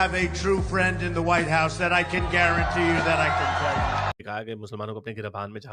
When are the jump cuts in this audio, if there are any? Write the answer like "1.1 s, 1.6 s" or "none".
4.1 s